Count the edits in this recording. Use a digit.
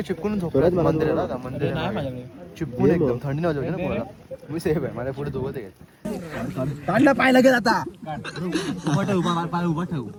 0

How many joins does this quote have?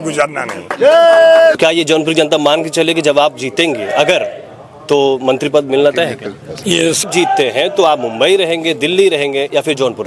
2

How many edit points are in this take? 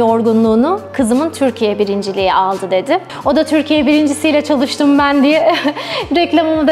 1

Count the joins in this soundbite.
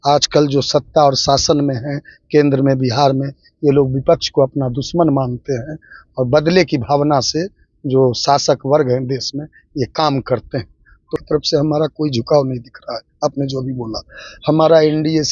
1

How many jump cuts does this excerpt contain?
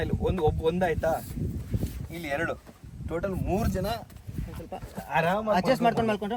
0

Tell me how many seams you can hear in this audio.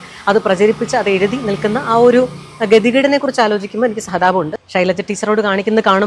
1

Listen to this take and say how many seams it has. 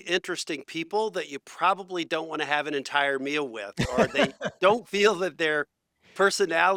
0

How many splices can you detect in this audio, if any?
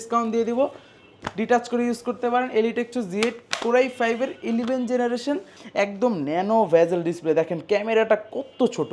1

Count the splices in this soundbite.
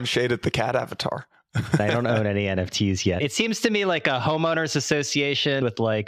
1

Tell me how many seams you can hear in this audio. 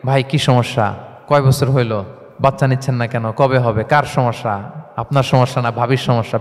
2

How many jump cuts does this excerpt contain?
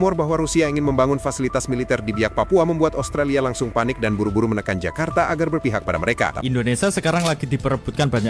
1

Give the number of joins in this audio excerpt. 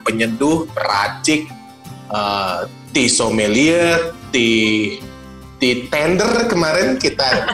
0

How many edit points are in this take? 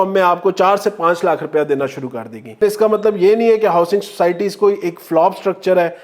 1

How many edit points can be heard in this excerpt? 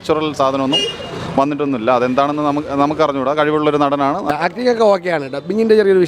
1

